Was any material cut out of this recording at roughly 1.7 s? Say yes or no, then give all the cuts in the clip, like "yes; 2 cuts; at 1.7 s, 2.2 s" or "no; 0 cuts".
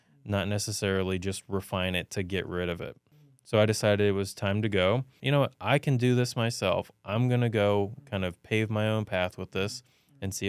no; 2 cuts; at 3.1 s, 5.2 s